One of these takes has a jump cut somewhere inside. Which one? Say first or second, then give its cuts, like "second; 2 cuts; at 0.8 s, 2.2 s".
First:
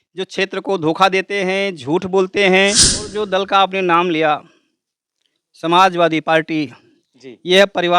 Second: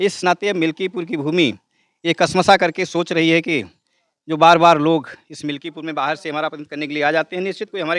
first; 1 cut; at 3.0 s